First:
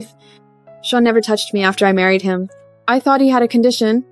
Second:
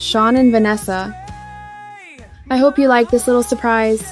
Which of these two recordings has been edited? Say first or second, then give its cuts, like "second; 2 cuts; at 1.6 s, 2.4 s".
second; 2 cuts; at 1.1 s, 2.4 s